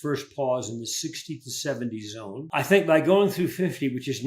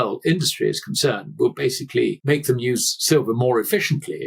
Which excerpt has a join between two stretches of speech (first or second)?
first